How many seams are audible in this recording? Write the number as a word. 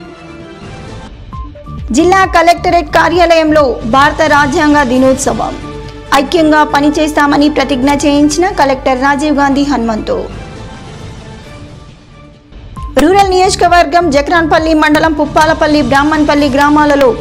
one